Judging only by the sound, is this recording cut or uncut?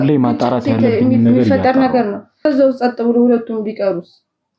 cut